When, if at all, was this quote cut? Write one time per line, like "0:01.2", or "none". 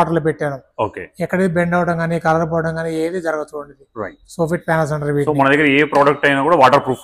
none